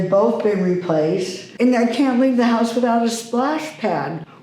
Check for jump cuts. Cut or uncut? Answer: cut